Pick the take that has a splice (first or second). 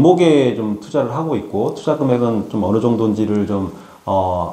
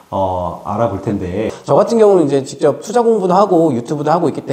second